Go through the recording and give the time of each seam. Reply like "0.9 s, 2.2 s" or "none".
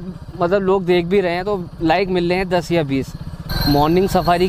3.5 s